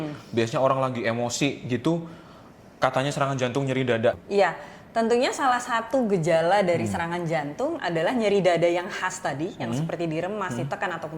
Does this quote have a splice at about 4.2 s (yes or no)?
yes